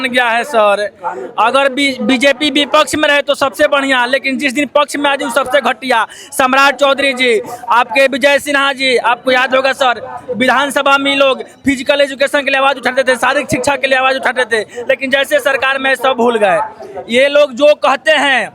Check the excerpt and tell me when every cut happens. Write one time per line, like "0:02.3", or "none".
none

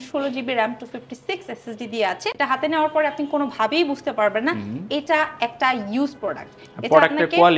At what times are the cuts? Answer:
0:02.3

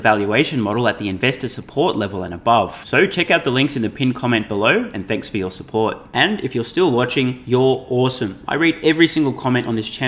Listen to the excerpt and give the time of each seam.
none

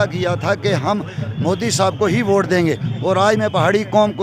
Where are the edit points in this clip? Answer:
none

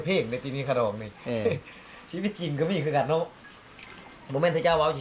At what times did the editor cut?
0:03.4

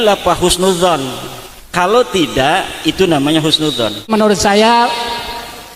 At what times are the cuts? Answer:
0:04.1

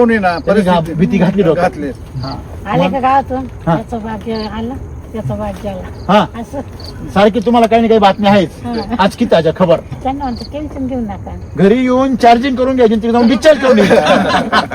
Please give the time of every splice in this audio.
0:09.9
0:11.3

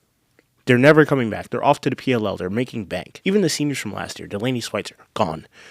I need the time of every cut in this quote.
0:03.1

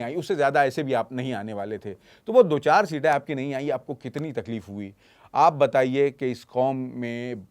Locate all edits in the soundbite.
none

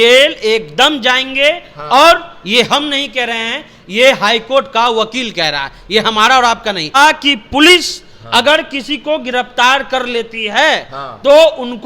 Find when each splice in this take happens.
0:06.9

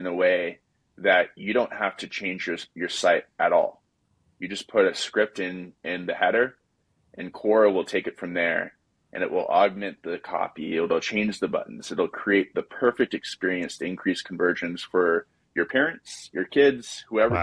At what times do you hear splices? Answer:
none

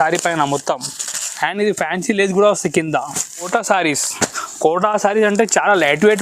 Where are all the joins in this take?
0:03.5

